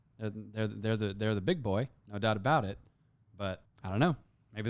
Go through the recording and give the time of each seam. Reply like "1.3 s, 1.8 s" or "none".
3.7 s